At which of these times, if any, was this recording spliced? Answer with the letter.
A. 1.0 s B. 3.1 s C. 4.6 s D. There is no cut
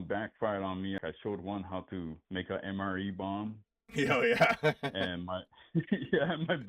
A